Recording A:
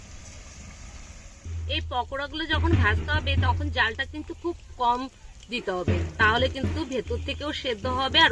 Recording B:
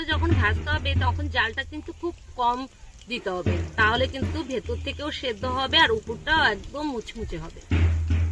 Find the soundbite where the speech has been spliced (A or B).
A